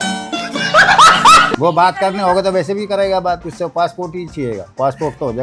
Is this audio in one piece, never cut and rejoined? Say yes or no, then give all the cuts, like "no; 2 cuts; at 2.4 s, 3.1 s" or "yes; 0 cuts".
no; 1 cut; at 1.4 s